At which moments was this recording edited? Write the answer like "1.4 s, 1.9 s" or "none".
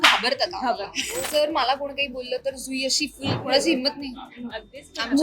1.2 s, 3.4 s